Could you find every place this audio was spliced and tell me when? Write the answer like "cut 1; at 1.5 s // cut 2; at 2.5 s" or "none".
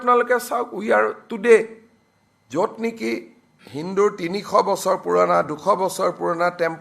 none